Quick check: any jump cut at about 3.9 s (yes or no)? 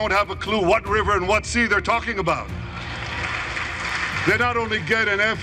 yes